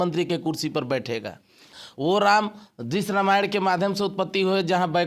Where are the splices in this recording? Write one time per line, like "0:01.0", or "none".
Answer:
0:01.7